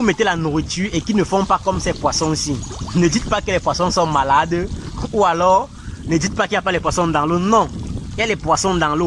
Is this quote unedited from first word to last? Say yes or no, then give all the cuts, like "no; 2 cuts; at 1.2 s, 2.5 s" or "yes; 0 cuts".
yes; 0 cuts